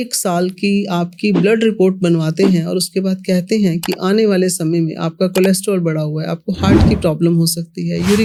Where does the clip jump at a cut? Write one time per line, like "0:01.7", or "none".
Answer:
none